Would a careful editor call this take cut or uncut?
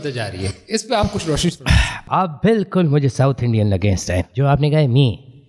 cut